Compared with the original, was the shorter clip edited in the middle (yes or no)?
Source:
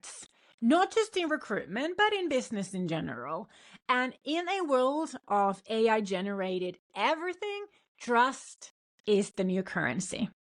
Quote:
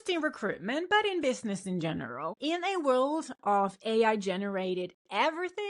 yes